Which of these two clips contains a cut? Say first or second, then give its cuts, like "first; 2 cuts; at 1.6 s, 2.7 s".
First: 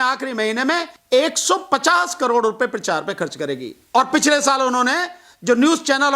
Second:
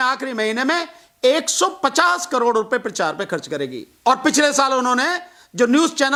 first; 1 cut; at 0.9 s